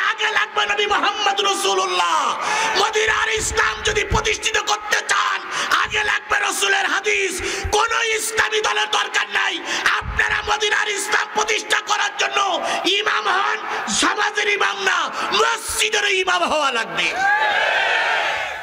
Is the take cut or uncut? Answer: uncut